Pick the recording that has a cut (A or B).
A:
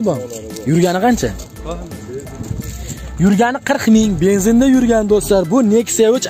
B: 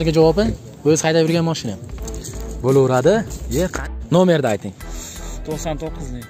B